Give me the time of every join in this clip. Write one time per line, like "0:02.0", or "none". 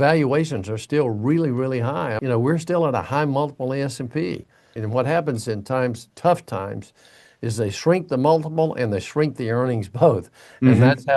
0:02.2
0:04.7